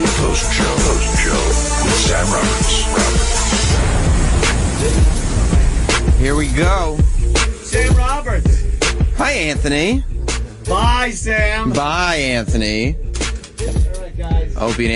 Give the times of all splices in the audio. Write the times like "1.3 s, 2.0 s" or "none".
none